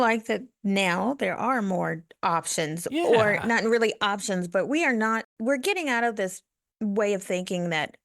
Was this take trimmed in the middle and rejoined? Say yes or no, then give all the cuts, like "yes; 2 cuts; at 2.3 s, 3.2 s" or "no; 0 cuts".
yes; 1 cut; at 5.3 s